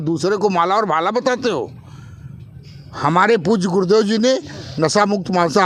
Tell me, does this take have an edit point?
no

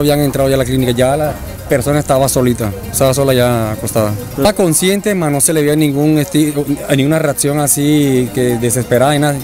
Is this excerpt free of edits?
yes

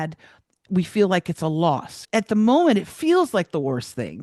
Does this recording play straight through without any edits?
no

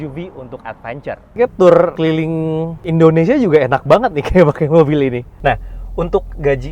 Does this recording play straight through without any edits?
no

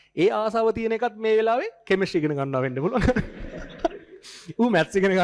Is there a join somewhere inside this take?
no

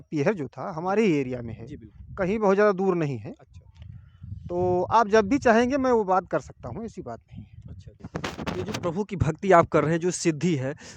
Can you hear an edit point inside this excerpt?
yes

